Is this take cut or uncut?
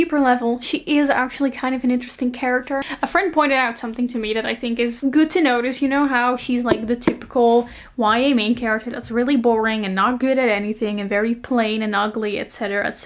uncut